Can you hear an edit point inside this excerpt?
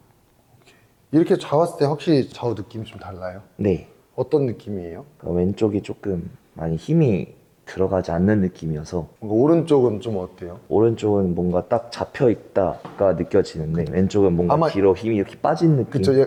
no; 0 cuts

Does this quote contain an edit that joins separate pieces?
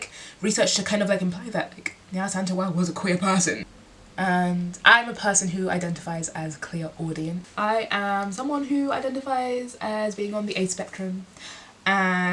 yes; 2 cuts; at 3.7 s, 7.5 s

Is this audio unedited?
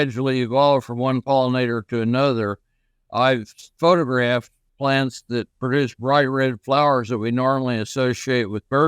no; 2 cuts; at 3.6 s, 4.6 s

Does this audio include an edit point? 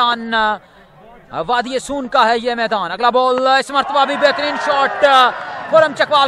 no; 0 cuts

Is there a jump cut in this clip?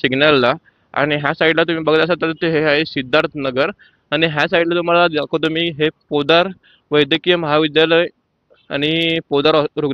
no; 0 cuts

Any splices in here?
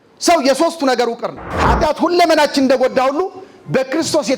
yes; 1 cut; at 1.5 s

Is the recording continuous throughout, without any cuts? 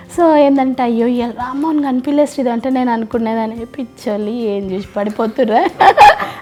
yes; 0 cuts

